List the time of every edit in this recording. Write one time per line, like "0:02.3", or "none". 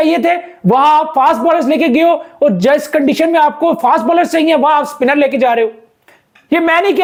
none